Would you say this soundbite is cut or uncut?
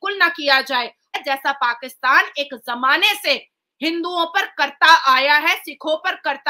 cut